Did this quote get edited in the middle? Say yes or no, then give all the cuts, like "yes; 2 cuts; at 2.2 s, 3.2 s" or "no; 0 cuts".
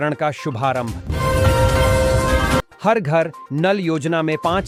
no; 0 cuts